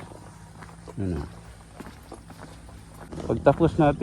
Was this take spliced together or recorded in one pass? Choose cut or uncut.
cut